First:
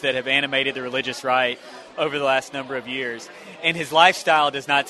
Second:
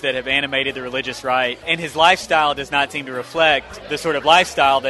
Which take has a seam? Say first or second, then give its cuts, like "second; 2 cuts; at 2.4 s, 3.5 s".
second; 2 cuts; at 1.6 s, 3.8 s